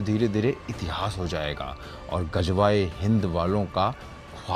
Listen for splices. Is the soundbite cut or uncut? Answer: uncut